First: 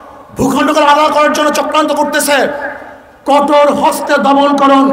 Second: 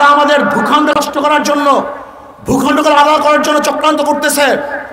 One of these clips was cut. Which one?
second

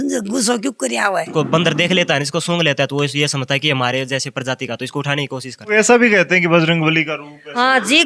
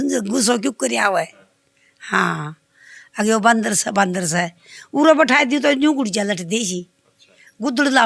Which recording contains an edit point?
first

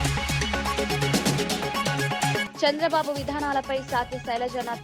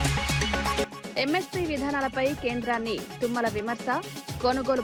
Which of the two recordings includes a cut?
first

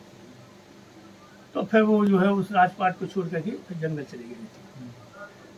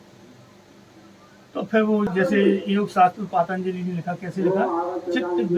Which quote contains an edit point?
second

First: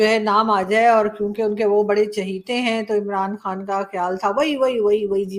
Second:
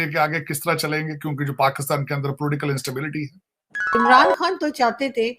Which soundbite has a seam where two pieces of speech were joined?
second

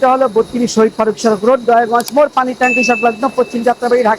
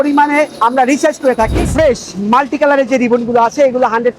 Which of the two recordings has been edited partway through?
second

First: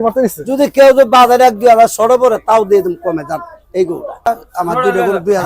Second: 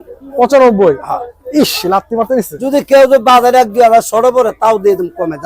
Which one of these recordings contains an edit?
first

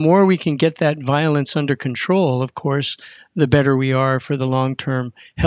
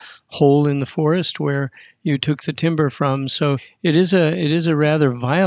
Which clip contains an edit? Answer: second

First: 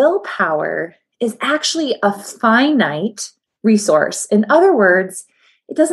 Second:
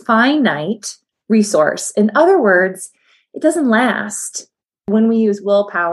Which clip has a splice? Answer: second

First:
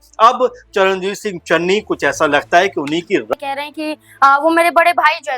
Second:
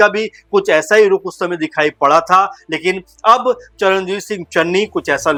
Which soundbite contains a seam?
first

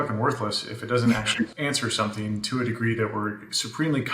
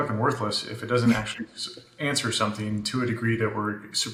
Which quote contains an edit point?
first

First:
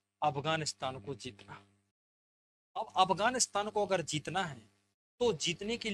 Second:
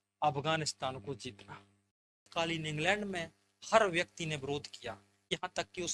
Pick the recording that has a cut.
second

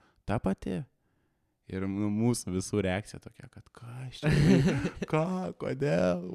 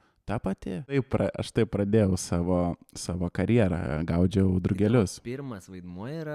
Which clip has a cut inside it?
second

